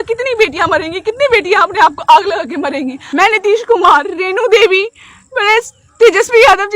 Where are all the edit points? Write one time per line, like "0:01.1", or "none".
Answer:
0:03.1